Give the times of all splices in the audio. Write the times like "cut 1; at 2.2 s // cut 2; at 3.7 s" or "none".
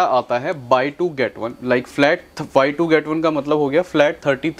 none